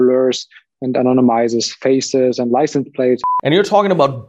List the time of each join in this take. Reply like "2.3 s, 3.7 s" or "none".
3.2 s